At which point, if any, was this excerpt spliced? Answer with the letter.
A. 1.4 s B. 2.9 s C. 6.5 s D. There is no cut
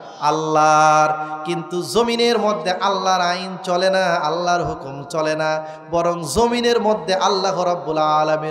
D